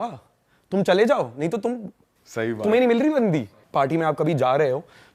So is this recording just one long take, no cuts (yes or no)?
no